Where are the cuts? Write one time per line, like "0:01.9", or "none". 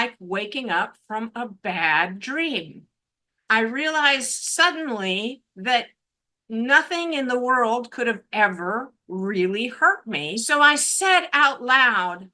0:10.4